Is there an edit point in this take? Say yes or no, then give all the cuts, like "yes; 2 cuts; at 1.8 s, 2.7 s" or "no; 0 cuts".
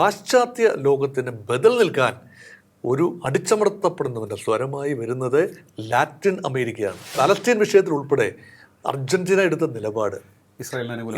yes; 1 cut; at 7.2 s